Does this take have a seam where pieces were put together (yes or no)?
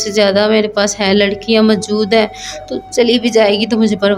no